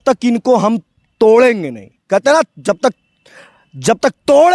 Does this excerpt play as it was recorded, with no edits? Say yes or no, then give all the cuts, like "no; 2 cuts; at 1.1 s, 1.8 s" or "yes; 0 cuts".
no; 1 cut; at 1.0 s